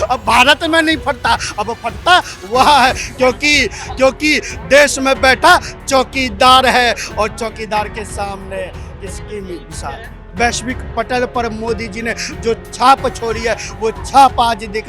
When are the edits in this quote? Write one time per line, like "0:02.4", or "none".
0:10.2